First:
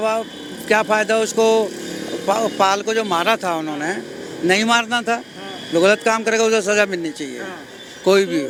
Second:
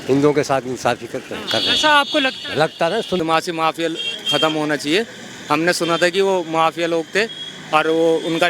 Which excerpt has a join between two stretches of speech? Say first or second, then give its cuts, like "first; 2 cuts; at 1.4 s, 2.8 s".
second; 1 cut; at 3.2 s